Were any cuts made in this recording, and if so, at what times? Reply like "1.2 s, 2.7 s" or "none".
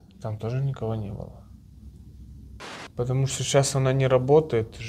2.8 s